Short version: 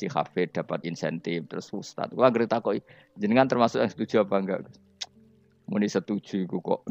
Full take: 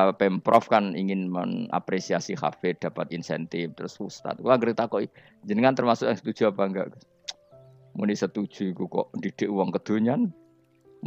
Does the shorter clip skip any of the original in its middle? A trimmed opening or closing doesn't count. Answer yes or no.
no